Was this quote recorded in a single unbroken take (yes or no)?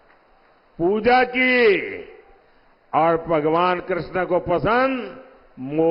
yes